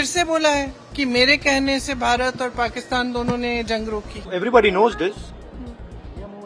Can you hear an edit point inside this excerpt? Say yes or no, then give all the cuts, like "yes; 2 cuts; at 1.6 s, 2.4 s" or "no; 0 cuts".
yes; 1 cut; at 4.2 s